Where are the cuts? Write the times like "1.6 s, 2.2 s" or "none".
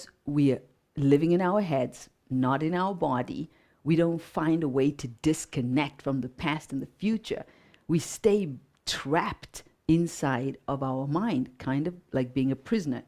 none